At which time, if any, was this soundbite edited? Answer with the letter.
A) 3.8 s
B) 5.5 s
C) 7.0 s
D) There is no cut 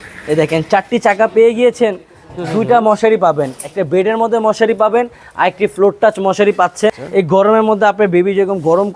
C